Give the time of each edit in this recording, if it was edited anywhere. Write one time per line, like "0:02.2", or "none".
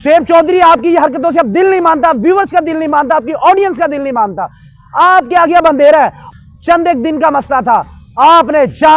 0:06.2